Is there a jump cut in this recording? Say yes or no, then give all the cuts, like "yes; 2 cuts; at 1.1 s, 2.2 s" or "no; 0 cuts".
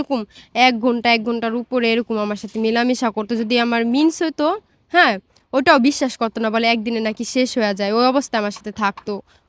no; 0 cuts